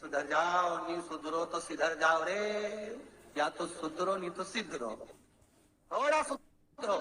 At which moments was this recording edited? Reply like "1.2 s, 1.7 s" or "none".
none